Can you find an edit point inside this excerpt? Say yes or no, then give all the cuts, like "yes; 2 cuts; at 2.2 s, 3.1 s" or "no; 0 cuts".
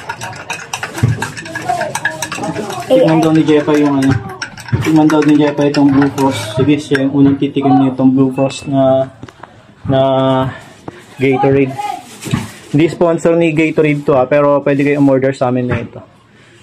no; 0 cuts